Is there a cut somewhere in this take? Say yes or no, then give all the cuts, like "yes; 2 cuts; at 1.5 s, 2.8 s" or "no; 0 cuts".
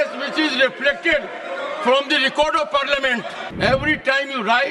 yes; 1 cut; at 3.4 s